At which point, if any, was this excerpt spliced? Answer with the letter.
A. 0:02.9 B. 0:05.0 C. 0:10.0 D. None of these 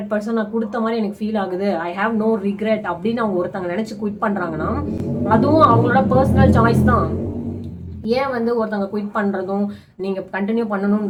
D